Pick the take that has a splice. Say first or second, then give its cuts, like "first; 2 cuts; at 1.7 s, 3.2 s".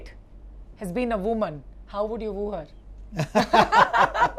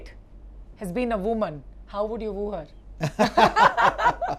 second; 1 cut; at 2.8 s